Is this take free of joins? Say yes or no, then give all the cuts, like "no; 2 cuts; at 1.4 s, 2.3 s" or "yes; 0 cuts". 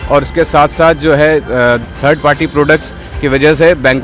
yes; 0 cuts